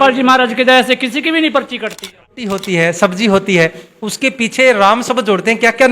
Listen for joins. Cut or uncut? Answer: cut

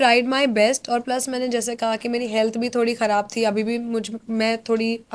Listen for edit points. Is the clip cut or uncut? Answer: uncut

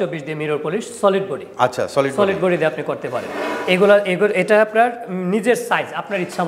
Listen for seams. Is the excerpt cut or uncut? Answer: uncut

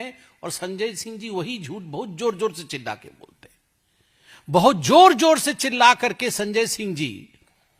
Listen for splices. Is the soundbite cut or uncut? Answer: uncut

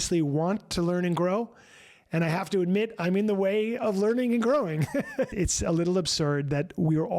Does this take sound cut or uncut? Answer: cut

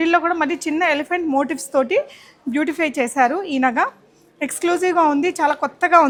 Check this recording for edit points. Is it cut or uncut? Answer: uncut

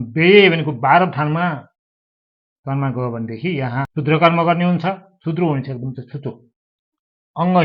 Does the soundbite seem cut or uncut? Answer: cut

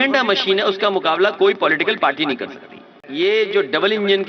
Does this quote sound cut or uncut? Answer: cut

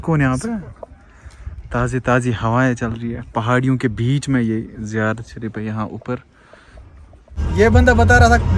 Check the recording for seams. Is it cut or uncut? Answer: cut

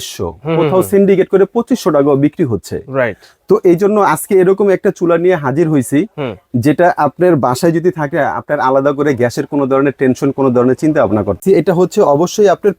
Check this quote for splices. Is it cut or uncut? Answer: cut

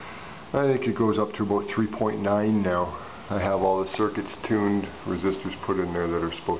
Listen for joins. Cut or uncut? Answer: cut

